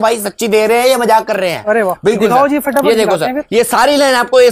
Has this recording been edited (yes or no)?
no